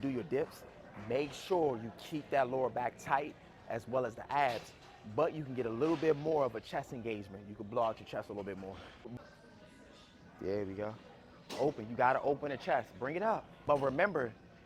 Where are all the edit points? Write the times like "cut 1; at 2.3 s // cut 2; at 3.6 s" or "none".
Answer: cut 1; at 9.1 s // cut 2; at 13.5 s